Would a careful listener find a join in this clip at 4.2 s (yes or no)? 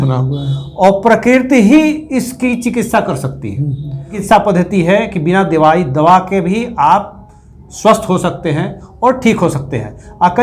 yes